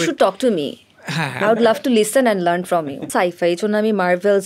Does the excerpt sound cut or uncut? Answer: cut